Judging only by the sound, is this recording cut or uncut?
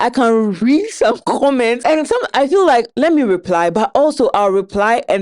cut